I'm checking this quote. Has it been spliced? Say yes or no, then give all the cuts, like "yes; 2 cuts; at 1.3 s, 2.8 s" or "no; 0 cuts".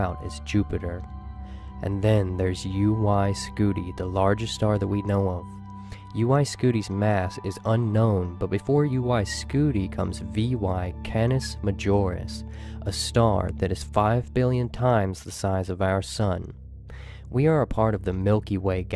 yes; 1 cut; at 2.0 s